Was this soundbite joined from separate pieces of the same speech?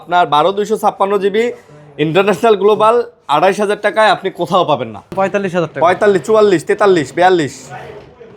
yes; 1 cut; at 5.1 s

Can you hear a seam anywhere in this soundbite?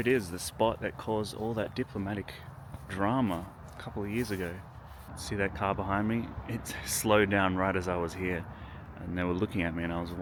no; 0 cuts

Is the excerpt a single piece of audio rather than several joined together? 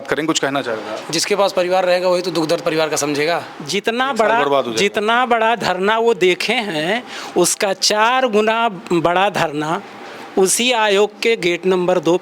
no; 1 cut; at 3.6 s

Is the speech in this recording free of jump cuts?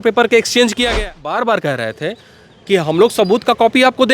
no; 1 cut; at 1.1 s

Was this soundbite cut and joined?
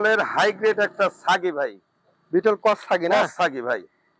no; 0 cuts

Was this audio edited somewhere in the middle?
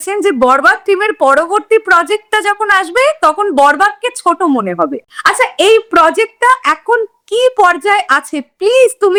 no; 0 cuts

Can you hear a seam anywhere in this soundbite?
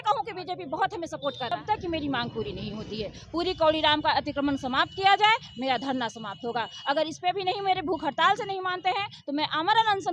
yes; 1 cut; at 1.6 s

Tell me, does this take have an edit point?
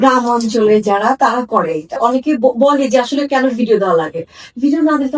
yes; 1 cut; at 2.0 s

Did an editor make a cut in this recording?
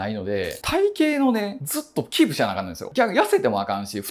no; 0 cuts

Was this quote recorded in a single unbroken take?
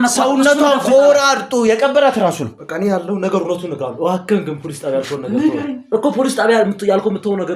no; 1 cut; at 2.5 s

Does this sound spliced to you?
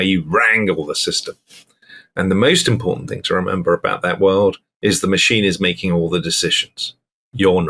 no; 0 cuts

